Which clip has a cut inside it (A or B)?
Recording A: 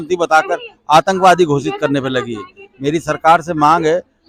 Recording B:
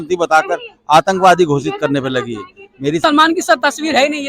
B